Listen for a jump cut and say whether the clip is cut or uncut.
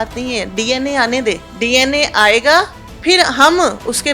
cut